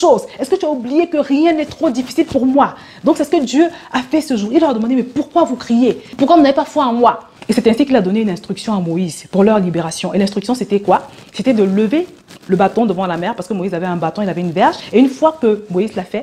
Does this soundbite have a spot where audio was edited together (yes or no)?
no